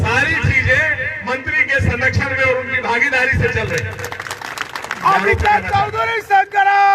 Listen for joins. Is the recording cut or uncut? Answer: uncut